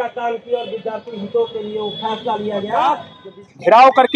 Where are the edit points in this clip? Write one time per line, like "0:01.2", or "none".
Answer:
0:03.0